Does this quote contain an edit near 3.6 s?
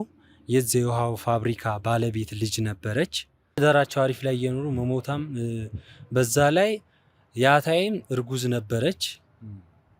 yes; 1 cut; at 3.6 s

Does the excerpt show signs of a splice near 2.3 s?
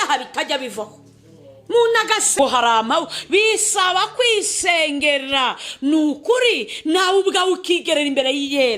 yes; 1 cut; at 2.3 s

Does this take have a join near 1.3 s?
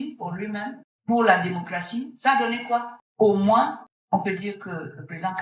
no; 2 cuts; at 3.0 s, 3.9 s

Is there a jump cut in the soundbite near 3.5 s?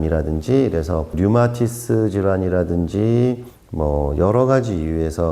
yes; 2 cuts; at 1.1 s, 3.5 s

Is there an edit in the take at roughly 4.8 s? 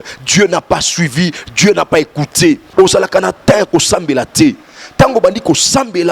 no; 1 cut; at 2.7 s

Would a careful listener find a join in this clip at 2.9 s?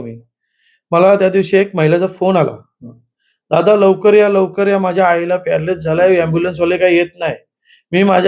no; 0 cuts

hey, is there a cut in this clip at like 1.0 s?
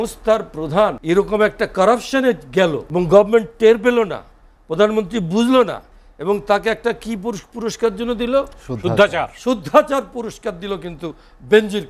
yes; 2 cuts; at 1.0 s, 2.8 s

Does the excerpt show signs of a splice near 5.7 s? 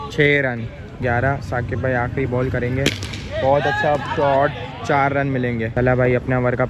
yes; 2 cuts; at 1.0 s, 5.7 s

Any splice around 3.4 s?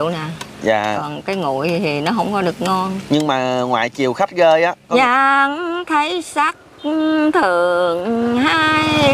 no; 1 cut; at 4.9 s

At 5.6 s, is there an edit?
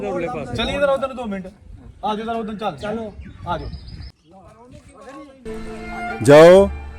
yes; 1 cut; at 5.6 s

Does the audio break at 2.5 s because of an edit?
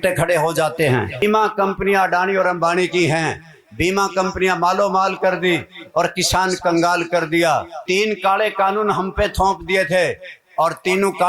no; 2 cuts; at 1.2 s, 7.7 s

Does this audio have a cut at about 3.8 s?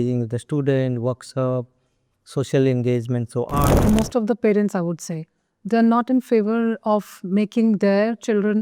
yes; 1 cut; at 3.8 s

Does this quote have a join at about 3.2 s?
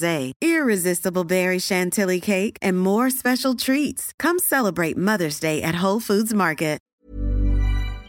no; 1 cut; at 6.8 s

